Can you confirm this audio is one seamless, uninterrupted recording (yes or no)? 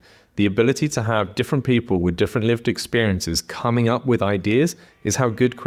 yes